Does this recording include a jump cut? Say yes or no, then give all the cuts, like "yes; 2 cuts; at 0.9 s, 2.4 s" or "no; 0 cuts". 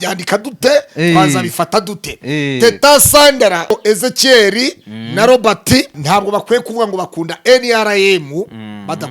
yes; 2 cuts; at 3.7 s, 6.0 s